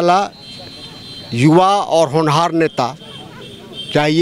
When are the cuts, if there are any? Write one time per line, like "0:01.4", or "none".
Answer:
none